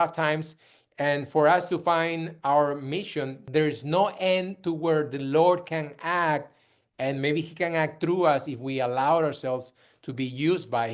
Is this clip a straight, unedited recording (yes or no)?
no